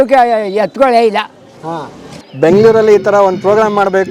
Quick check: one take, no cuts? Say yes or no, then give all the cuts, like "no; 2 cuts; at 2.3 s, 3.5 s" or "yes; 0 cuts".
no; 1 cut; at 2.1 s